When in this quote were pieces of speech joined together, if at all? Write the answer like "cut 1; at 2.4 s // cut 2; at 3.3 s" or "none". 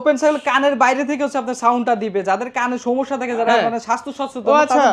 none